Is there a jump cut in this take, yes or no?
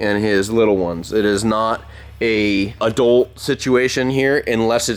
no